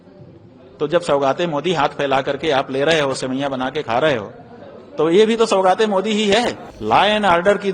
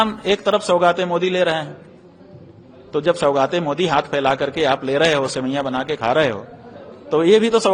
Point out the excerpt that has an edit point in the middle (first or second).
first